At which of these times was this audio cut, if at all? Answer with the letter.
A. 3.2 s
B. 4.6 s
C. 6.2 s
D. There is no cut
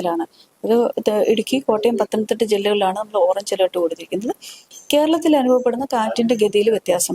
B